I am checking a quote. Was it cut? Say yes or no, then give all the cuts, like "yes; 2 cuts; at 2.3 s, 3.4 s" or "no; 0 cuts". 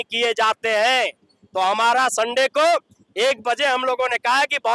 no; 0 cuts